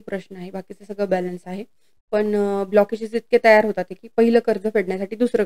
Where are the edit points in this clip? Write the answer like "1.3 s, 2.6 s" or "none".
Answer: none